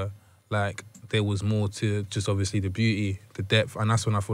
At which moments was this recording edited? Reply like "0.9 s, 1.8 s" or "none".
none